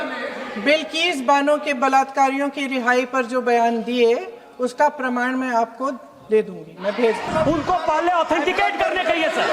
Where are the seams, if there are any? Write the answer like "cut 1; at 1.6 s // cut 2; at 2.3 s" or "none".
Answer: cut 1; at 7.2 s